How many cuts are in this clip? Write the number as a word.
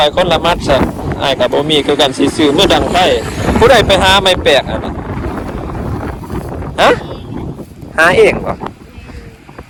zero